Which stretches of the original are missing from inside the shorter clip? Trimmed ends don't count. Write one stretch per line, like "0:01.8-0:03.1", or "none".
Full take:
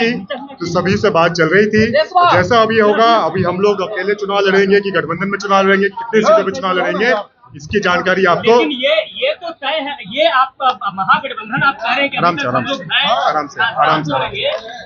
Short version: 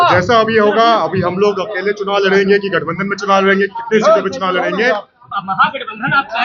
0:07.6-0:10.9